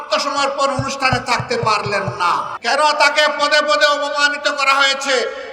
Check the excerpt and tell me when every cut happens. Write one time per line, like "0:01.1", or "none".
0:02.5